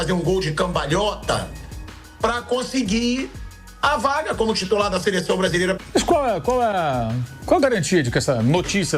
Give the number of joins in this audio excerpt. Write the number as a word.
one